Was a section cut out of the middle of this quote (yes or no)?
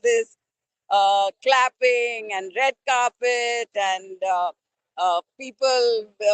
no